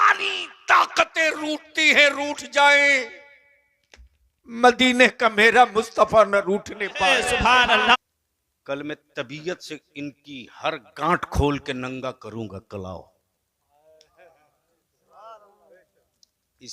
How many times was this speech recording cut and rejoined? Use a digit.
1